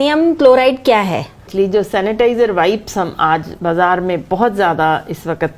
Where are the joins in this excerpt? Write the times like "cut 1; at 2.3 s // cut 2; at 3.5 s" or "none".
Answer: cut 1; at 1.5 s